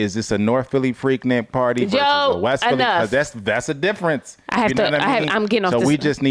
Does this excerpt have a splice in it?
no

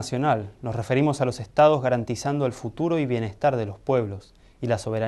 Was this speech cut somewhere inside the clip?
no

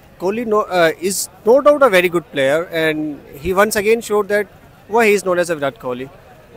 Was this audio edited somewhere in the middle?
no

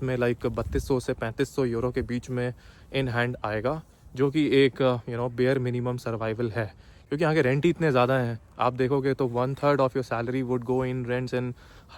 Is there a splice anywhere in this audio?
no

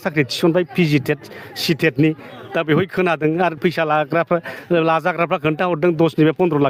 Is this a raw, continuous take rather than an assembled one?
yes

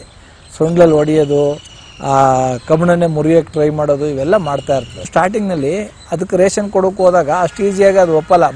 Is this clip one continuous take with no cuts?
no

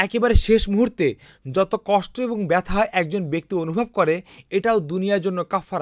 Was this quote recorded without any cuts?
yes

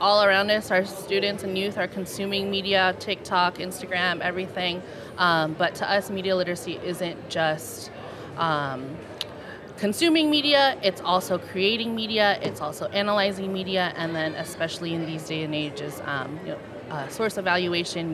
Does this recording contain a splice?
no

